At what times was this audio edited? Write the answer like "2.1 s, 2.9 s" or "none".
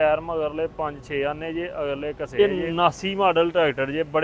2.4 s